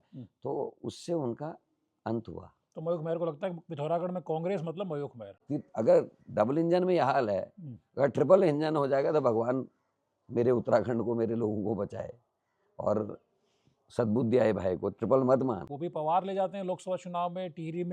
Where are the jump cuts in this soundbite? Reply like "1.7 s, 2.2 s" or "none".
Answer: 5.4 s, 15.7 s